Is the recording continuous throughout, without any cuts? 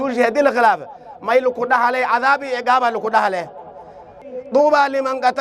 no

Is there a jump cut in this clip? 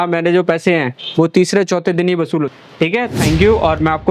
yes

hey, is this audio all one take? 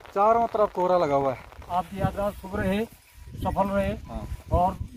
no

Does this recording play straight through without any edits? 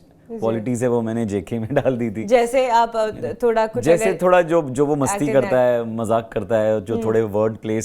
yes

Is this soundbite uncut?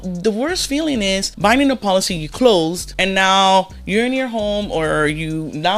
no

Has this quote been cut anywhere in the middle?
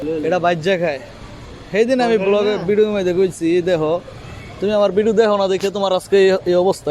no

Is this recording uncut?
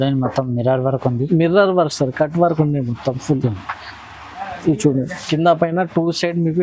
yes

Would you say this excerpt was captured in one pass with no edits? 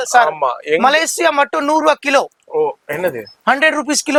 yes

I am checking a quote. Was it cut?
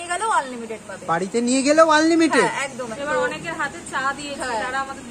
yes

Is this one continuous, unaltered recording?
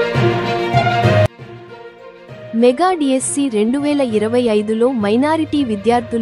no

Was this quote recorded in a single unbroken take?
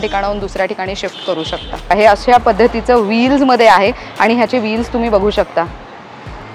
no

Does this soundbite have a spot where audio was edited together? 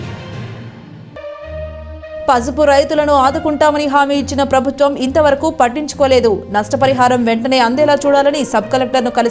no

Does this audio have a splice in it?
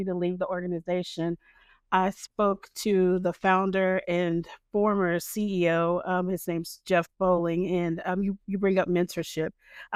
no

